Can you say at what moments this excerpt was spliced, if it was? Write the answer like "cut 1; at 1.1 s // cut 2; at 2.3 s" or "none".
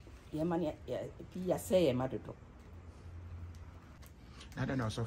cut 1; at 4.0 s